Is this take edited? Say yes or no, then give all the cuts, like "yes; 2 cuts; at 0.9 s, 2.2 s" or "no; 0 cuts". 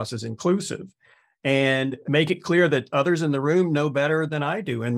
yes; 1 cut; at 1.3 s